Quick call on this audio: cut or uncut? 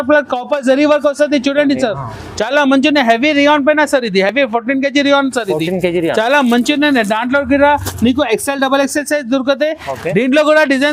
uncut